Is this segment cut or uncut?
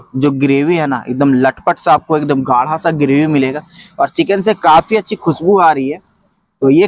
uncut